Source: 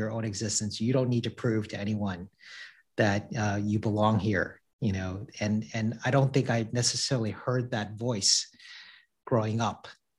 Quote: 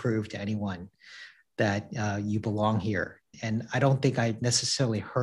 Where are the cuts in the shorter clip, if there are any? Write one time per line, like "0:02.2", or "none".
0:03.4